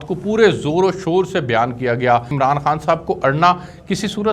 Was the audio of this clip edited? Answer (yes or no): yes